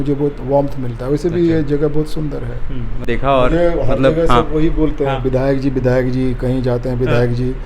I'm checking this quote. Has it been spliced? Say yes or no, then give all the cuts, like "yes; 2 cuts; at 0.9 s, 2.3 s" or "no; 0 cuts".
yes; 1 cut; at 3.1 s